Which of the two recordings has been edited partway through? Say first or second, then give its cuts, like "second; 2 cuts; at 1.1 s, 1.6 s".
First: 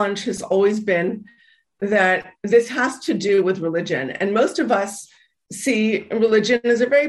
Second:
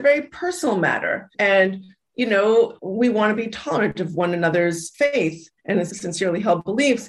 second; 3 cuts; at 1.3 s, 4.9 s, 5.9 s